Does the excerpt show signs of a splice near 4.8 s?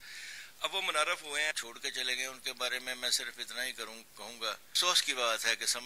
yes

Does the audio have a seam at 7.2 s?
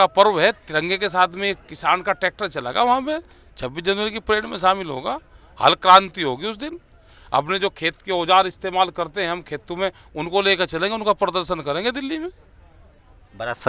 no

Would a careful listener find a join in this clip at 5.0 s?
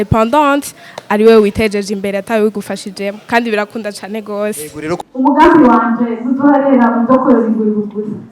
yes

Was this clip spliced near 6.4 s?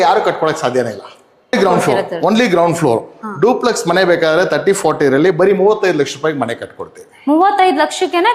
no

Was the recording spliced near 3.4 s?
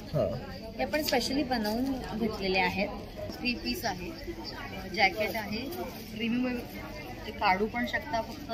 yes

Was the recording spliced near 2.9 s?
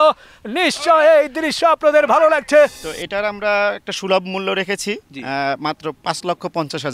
yes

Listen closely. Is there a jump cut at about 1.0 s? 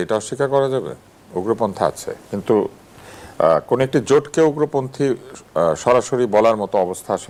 no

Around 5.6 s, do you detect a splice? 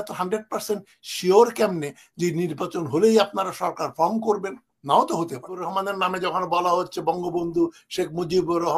yes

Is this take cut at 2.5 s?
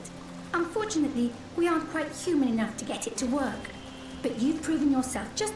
no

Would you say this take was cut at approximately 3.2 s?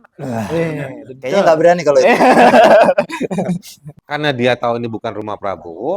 no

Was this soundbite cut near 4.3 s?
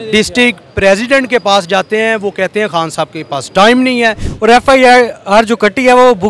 yes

